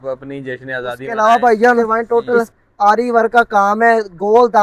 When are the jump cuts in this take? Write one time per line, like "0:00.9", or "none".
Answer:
0:01.8

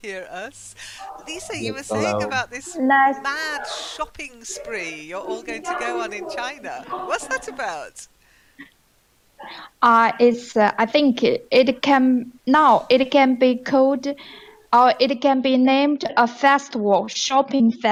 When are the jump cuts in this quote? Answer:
none

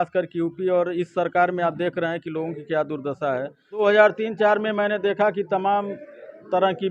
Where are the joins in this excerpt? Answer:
0:03.8

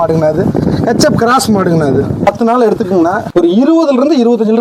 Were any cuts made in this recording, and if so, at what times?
0:02.3

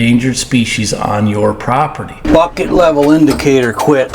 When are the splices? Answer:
0:02.2

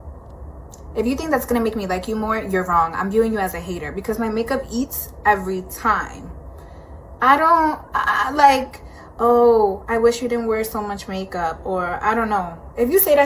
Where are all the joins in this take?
0:11.6

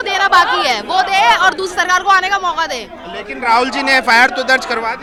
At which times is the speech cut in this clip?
none

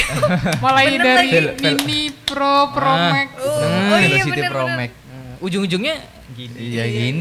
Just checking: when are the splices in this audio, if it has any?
none

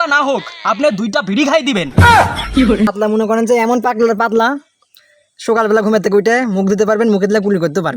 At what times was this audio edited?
0:02.9

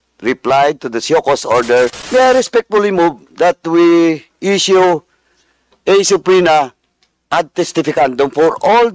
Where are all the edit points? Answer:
0:02.0

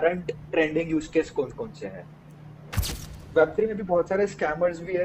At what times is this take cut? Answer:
0:03.0

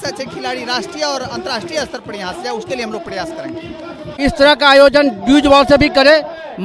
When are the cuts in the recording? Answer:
0:04.0

